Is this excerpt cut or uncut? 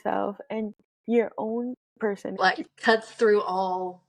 cut